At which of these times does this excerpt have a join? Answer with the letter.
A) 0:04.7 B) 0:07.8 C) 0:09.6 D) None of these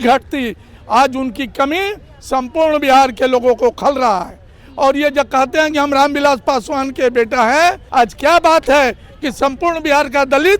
B